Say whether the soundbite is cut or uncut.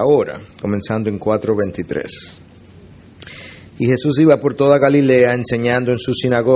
cut